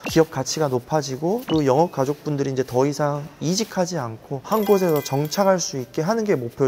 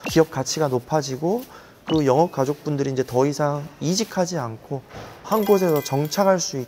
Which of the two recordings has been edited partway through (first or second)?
first